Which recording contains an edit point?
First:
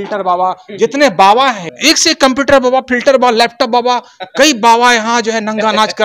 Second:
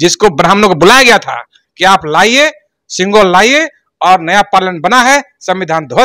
first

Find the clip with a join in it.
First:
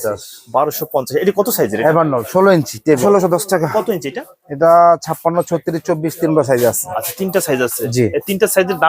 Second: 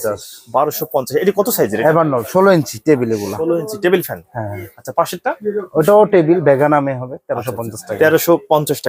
first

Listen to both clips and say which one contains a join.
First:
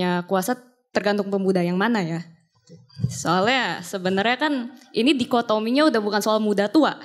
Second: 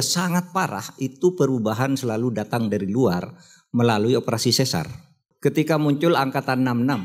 second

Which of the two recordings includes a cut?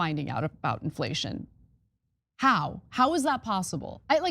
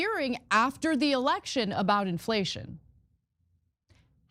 first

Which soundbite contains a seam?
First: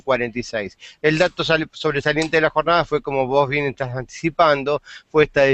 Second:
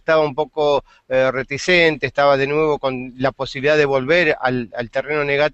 second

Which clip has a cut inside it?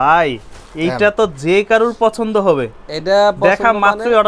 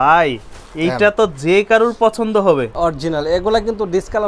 second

